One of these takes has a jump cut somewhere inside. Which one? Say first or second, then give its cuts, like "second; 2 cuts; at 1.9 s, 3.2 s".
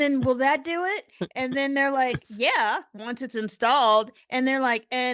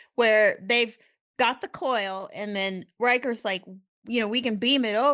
second; 1 cut; at 4.0 s